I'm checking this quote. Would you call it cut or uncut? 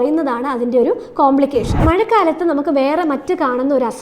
cut